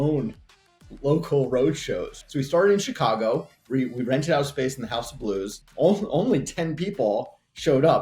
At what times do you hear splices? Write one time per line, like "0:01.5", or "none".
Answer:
0:02.1
0:05.6